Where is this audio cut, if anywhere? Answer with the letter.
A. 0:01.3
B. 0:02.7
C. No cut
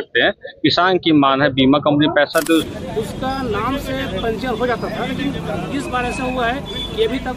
B